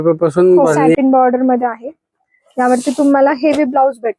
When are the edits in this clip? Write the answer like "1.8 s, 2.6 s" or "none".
0.9 s